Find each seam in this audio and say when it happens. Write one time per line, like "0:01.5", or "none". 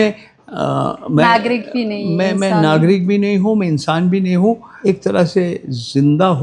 0:04.7